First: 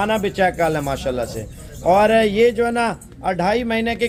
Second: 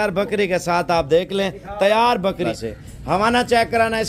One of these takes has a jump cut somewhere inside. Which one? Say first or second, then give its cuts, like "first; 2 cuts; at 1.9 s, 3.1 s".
second; 1 cut; at 2.4 s